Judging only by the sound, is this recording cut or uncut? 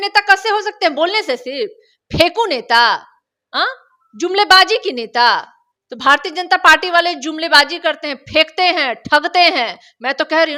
uncut